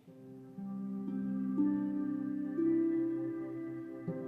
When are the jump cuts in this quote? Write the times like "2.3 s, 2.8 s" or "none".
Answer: 3.3 s

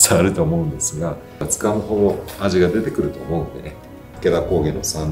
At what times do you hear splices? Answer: 1.5 s, 4.0 s

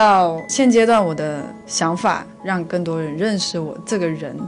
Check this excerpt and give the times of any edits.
2.3 s

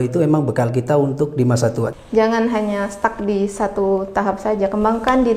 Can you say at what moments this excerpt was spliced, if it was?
1.9 s

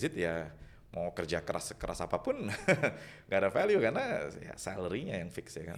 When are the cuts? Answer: none

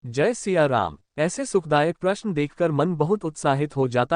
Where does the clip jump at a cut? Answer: 1.0 s

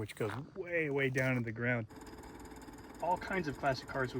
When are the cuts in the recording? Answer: 2.3 s

